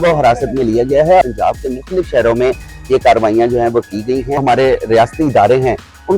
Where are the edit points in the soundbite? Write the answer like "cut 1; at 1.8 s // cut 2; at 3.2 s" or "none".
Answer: cut 1; at 1.2 s // cut 2; at 4.4 s